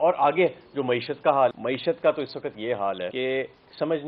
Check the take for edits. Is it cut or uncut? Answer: cut